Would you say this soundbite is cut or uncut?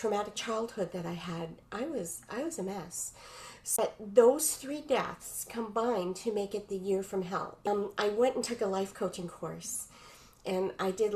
cut